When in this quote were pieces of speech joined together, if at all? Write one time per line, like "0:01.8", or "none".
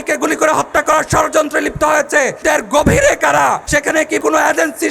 0:02.4
0:04.1